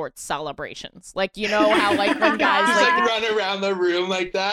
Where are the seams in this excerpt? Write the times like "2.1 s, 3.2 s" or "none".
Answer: 3.0 s